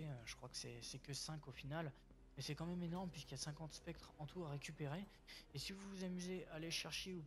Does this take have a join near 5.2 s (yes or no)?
yes